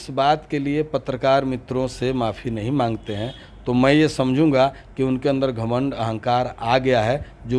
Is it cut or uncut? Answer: uncut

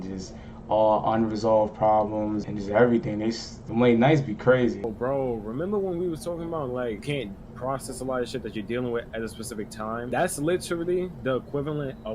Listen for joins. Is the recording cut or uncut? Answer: cut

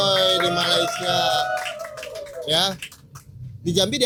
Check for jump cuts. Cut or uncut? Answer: uncut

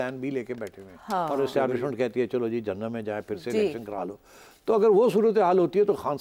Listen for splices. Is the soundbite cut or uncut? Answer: cut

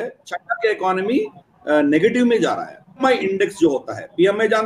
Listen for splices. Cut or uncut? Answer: cut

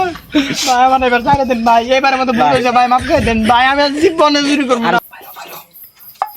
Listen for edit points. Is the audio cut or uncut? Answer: cut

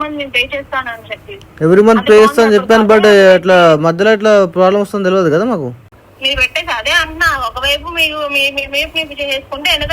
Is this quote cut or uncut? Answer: cut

